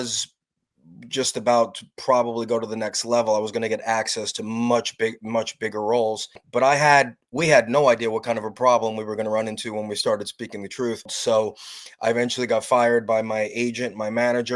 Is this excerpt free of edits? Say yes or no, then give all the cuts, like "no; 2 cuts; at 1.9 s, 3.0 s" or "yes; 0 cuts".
no; 2 cuts; at 6.4 s, 11.1 s